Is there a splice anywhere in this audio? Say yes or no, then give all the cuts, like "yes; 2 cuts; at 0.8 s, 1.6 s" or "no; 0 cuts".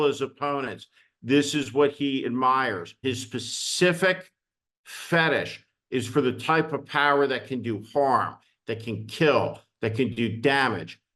yes; 1 cut; at 2.9 s